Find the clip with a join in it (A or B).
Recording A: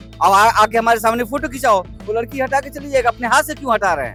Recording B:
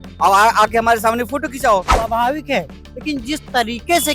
B